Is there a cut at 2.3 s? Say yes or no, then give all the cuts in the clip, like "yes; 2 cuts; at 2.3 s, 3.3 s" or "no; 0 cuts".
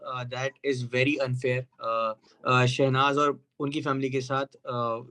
yes; 1 cut; at 2.3 s